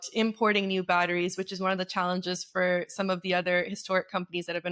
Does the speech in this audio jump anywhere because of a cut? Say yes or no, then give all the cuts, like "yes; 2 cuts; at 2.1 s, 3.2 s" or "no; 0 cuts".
no; 0 cuts